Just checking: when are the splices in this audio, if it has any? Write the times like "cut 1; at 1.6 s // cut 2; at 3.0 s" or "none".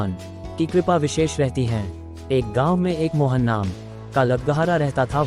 cut 1; at 2.2 s

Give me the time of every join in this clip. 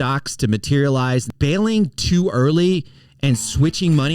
cut 1; at 1.3 s

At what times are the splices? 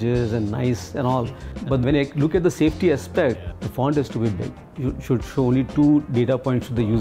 cut 1; at 1.8 s // cut 2; at 3.4 s // cut 3; at 4.7 s

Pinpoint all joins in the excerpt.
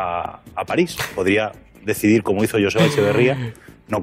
none

